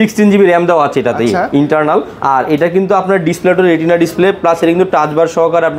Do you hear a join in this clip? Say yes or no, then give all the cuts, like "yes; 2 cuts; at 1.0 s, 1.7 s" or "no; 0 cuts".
no; 0 cuts